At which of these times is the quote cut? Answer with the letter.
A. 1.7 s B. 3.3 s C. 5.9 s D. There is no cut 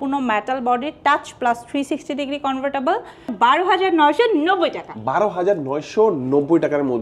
B